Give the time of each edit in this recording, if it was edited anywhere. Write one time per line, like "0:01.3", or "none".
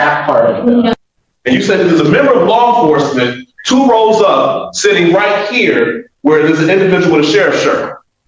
0:00.9